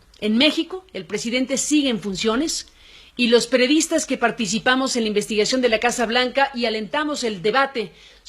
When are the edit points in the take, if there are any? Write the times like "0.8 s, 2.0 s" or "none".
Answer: 3.0 s